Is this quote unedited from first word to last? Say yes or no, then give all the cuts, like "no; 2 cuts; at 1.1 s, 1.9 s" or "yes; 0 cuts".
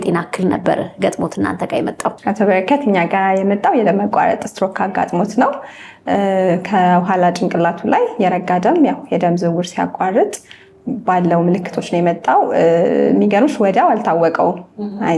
yes; 0 cuts